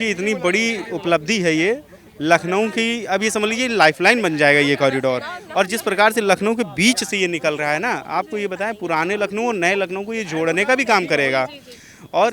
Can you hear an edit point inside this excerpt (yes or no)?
no